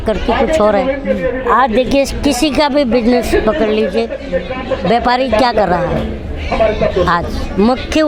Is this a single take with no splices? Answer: yes; 0 cuts

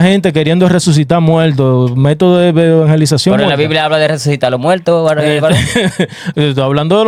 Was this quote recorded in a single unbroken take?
yes; 0 cuts

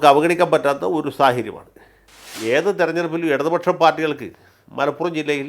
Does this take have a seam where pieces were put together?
yes; 1 cut; at 2.4 s

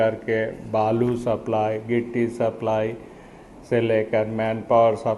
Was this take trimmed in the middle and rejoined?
no; 0 cuts

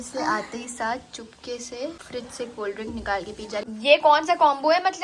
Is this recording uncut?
no; 2 cuts; at 2.0 s, 3.6 s

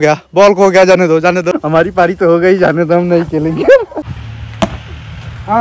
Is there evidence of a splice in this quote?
yes; 2 cuts; at 1.5 s, 4.0 s

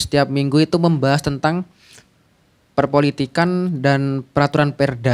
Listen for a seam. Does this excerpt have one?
no; 0 cuts

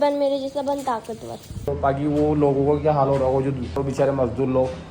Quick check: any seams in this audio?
yes; 2 cuts; at 1.7 s, 3.8 s

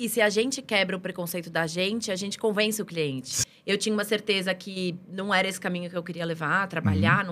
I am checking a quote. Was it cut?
yes; 1 cut; at 3.3 s

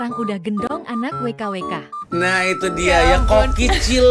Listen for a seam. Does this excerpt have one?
yes; 1 cut; at 2.0 s

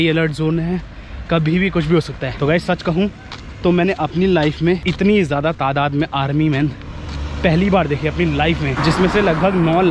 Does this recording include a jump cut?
yes; 3 cuts; at 2.2 s, 4.8 s, 8.7 s

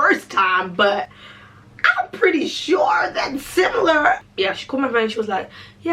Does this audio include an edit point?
yes; 1 cut; at 4.3 s

